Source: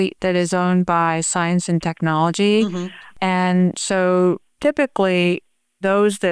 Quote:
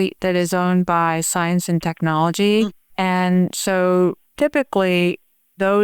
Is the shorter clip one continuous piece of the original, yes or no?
no